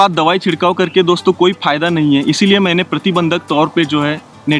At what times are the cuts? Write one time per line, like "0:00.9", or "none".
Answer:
none